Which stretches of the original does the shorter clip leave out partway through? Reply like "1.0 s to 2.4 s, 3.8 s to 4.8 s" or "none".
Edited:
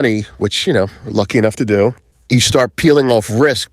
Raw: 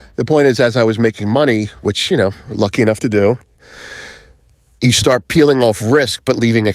3.5 s to 4.6 s